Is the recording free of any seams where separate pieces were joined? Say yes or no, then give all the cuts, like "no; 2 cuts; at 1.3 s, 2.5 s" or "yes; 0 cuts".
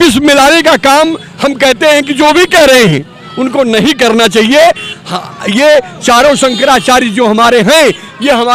yes; 0 cuts